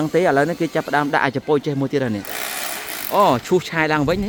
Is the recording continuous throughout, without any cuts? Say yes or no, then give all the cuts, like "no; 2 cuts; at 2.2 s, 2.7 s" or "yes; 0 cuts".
yes; 0 cuts